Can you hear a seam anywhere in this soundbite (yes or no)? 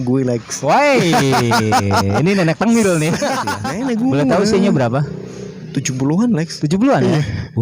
yes